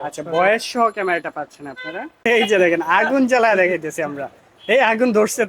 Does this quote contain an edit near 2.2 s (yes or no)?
yes